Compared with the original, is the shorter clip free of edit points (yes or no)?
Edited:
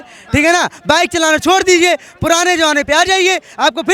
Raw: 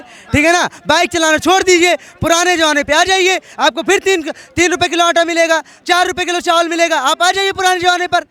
yes